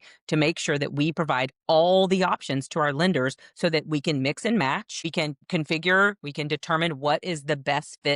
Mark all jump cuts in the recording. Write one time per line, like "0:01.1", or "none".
0:05.4